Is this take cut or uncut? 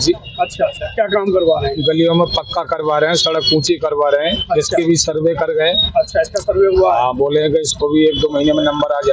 uncut